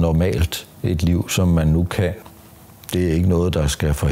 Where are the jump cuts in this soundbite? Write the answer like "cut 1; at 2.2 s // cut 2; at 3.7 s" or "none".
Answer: cut 1; at 2.2 s